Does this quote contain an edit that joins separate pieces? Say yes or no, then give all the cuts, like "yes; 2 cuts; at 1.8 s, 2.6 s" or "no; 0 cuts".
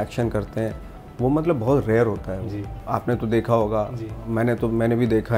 no; 0 cuts